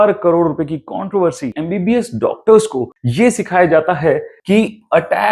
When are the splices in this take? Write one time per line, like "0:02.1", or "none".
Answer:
0:01.5